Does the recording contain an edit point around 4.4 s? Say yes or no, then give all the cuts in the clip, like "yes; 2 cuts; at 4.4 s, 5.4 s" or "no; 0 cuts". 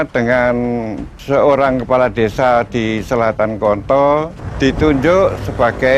yes; 1 cut; at 4.4 s